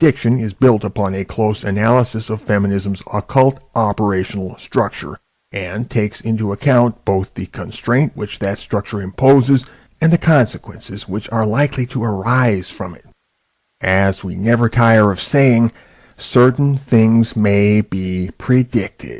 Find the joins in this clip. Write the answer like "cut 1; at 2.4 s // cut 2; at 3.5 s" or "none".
cut 1; at 8.3 s